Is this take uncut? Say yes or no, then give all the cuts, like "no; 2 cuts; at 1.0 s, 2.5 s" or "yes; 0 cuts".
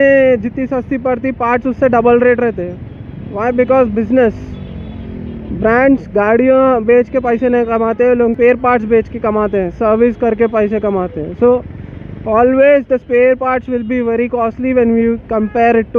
yes; 0 cuts